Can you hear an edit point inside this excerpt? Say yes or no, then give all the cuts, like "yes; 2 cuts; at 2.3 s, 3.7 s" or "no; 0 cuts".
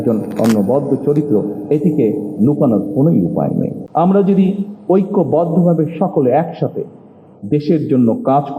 yes; 1 cut; at 3.8 s